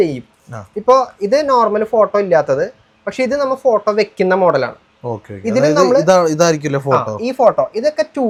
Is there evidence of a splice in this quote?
no; 0 cuts

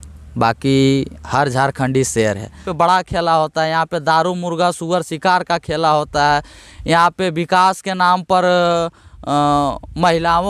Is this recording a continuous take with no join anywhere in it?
no; 1 cut; at 2.7 s

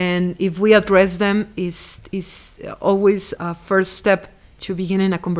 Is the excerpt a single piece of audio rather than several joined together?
no; 1 cut; at 3.3 s

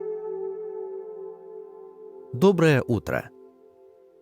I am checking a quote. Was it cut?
yes; 2 cuts; at 2.3 s, 3.2 s

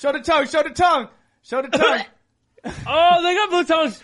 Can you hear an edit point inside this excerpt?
no; 0 cuts

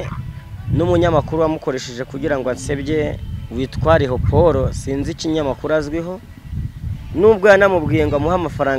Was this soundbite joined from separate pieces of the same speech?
no; 0 cuts

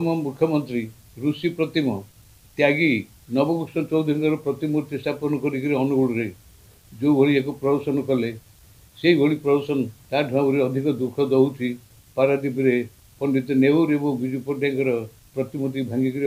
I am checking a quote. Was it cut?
yes; 3 cuts; at 3.1 s, 10.0 s, 13.0 s

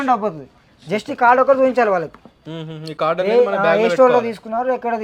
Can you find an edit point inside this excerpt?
no; 0 cuts

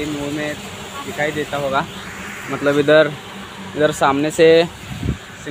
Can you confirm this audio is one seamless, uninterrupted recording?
yes; 0 cuts

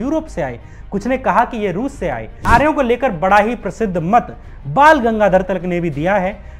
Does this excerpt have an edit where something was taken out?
yes; 1 cut; at 2.5 s

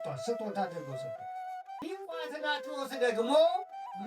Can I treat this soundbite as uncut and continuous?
no; 1 cut; at 2.2 s

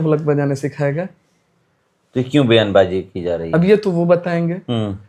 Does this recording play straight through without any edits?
yes; 0 cuts

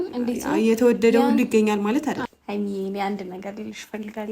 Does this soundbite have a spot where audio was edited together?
yes; 1 cut; at 2.2 s

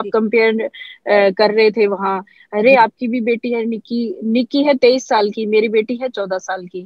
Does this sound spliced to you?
no; 0 cuts

